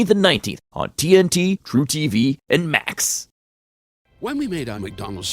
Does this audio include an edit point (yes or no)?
yes